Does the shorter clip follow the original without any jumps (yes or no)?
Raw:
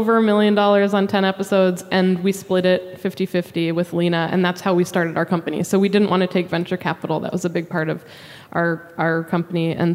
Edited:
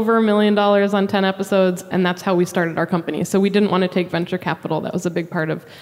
no